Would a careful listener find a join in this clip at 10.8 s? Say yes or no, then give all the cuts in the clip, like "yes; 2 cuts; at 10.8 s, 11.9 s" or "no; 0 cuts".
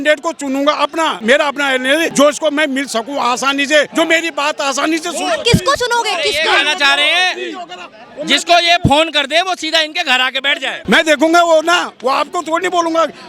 yes; 4 cuts; at 1.2 s, 2.1 s, 3.9 s, 10.8 s